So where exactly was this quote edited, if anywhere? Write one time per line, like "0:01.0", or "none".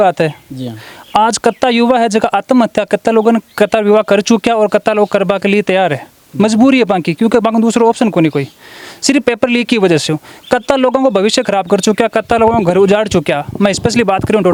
none